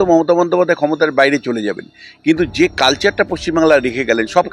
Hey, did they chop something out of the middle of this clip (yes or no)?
no